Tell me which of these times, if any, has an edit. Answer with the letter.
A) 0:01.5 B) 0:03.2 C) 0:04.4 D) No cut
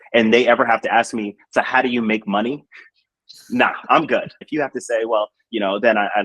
C